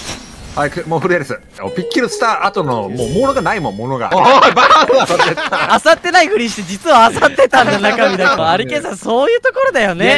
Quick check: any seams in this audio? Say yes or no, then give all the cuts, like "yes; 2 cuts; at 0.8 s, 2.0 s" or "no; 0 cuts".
yes; 4 cuts; at 1.5 s, 4.1 s, 5.7 s, 8.4 s